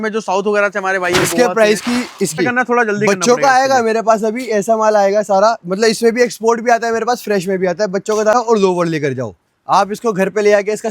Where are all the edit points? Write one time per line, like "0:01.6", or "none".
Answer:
0:02.4
0:08.3